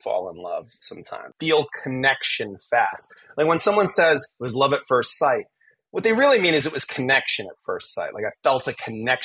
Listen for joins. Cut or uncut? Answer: cut